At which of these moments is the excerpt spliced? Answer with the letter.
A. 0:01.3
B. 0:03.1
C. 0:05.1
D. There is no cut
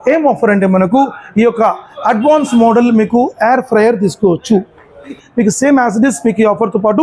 C